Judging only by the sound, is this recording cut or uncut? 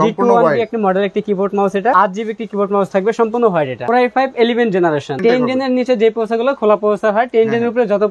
cut